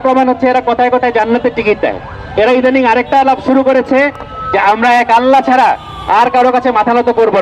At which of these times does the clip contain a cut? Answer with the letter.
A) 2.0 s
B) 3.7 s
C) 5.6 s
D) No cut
D